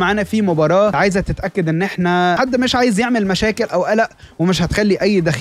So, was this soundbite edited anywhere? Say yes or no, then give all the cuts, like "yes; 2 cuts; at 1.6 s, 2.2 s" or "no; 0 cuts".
yes; 2 cuts; at 1.0 s, 2.4 s